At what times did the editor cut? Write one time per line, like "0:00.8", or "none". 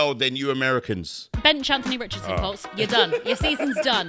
0:01.3